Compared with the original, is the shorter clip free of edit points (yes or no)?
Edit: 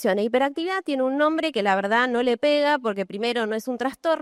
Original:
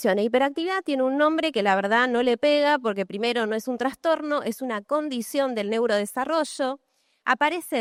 yes